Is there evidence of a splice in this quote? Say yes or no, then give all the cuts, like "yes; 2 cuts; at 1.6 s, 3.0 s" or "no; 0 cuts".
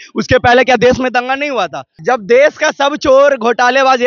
yes; 1 cut; at 1.9 s